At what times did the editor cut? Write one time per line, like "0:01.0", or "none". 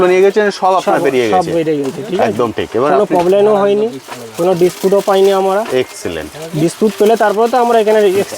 none